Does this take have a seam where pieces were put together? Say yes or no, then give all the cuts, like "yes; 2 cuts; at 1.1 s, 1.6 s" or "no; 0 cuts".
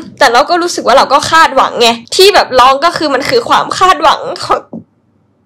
no; 0 cuts